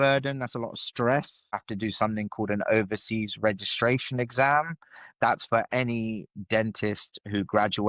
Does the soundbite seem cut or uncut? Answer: cut